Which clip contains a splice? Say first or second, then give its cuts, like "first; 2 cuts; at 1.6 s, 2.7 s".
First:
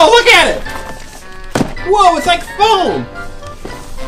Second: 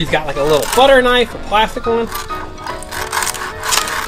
first; 1 cut; at 3.1 s